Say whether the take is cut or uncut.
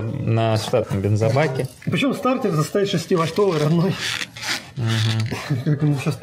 cut